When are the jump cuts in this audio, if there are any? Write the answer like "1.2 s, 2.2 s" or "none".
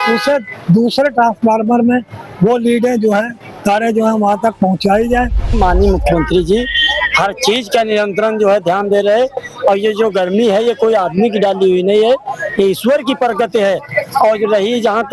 5.5 s